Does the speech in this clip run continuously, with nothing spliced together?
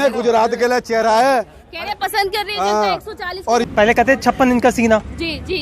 no; 1 cut; at 3.7 s

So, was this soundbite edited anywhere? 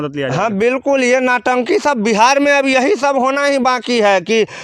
no; 0 cuts

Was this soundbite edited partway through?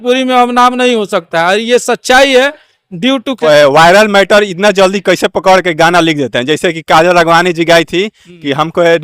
yes; 1 cut; at 3.3 s

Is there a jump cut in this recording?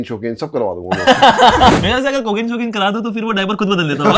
yes; 1 cut; at 1.7 s

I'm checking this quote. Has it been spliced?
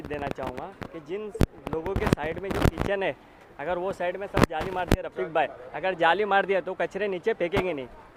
no; 0 cuts

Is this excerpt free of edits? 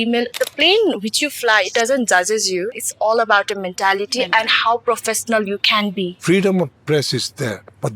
no; 2 cuts; at 2.7 s, 6.2 s

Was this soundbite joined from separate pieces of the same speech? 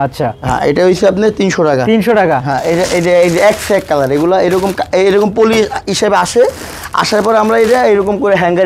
no; 0 cuts

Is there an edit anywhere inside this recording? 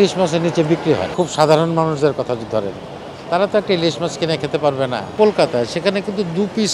yes; 2 cuts; at 1.1 s, 5.1 s

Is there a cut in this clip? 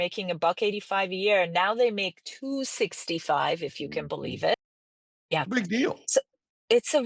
yes; 1 cut; at 4.5 s

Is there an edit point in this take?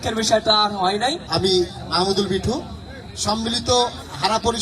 yes; 1 cut; at 1.2 s

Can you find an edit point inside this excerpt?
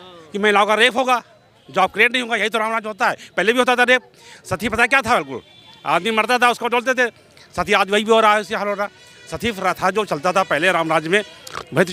no; 0 cuts

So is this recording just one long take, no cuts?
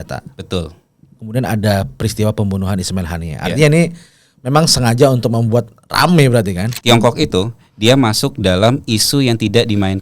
no; 1 cut; at 6.7 s

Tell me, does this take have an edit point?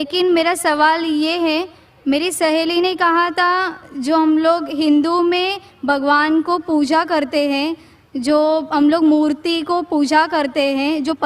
yes; 1 cut; at 9.9 s

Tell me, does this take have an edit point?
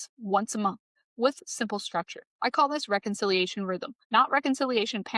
yes; 2 cuts; at 2.2 s, 3.9 s

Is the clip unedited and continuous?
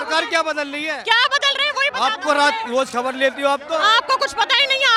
yes; 0 cuts

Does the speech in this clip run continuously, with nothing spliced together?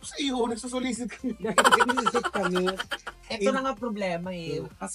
no; 1 cut; at 3.2 s

